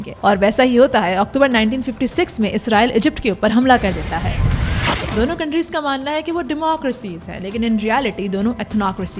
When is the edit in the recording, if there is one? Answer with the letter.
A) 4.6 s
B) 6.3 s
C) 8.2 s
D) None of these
A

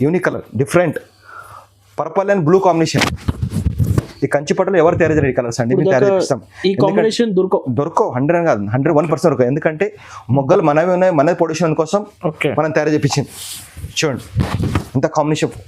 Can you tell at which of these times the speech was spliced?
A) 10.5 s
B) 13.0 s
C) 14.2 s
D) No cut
D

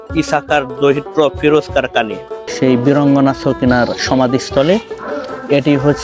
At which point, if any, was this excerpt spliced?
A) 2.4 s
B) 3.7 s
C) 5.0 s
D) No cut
A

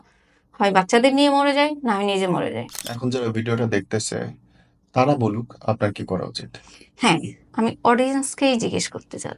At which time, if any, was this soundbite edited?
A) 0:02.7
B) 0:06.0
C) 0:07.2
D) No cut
A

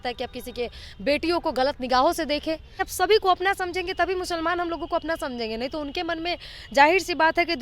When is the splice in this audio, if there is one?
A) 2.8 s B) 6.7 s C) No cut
A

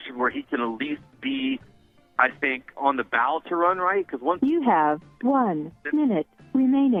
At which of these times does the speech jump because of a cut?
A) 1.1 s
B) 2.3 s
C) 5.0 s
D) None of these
D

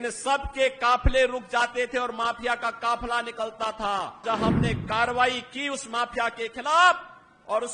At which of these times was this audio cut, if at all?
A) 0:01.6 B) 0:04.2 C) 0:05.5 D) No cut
B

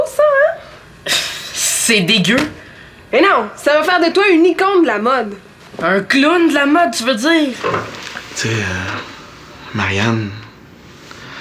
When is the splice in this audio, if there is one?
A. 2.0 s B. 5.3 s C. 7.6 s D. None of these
C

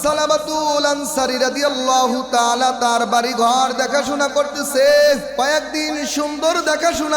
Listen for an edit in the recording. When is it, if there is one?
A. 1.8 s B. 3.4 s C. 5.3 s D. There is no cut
C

